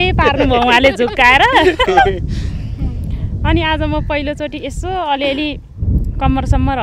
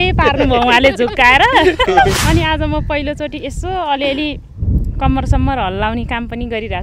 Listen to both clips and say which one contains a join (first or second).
second